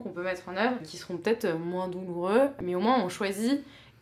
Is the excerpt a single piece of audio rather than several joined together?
no; 2 cuts; at 1.0 s, 2.6 s

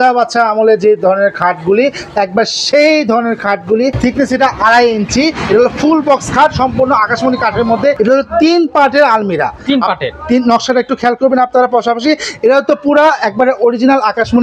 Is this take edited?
yes; 2 cuts; at 4.0 s, 8.0 s

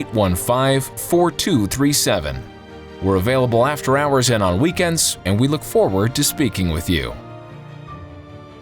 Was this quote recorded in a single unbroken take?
no; 1 cut; at 7.2 s

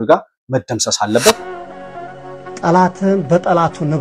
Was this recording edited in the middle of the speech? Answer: yes; 1 cut; at 1.5 s

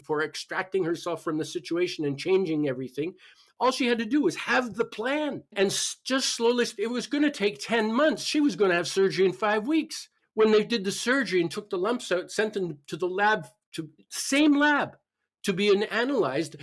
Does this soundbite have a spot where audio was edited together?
no; 0 cuts

